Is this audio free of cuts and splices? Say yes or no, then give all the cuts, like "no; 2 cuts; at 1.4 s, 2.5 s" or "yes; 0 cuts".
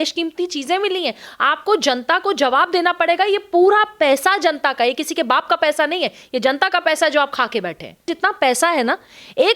no; 1 cut; at 8.1 s